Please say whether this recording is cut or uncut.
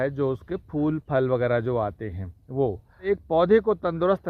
cut